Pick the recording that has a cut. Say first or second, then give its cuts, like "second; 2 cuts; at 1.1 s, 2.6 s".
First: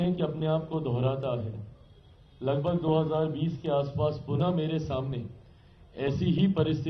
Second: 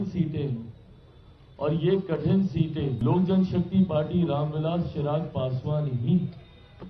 second; 1 cut; at 3.0 s